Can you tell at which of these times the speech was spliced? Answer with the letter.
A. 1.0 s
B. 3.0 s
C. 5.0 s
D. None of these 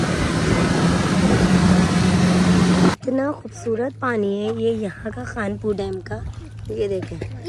B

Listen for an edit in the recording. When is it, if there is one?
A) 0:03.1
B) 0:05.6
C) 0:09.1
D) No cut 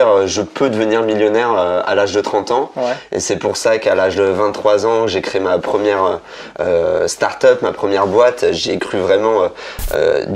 D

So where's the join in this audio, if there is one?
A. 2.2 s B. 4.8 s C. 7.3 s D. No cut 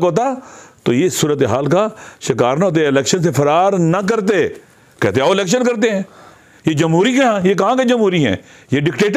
D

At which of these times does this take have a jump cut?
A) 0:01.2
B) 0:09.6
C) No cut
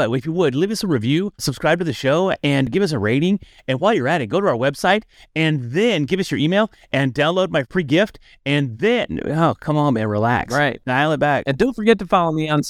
C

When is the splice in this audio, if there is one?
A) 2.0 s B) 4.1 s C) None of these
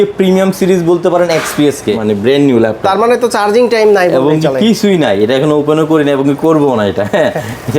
A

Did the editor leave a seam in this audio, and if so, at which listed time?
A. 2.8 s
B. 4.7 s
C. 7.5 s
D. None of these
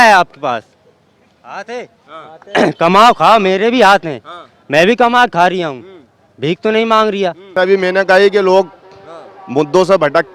C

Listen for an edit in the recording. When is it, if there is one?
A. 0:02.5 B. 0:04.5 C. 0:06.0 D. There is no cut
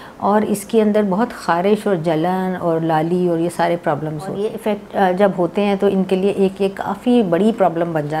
B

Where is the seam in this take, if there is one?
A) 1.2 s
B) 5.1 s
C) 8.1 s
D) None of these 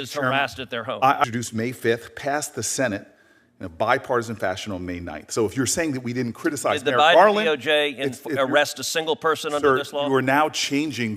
A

